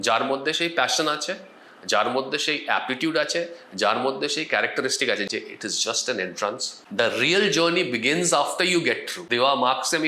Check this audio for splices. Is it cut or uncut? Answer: cut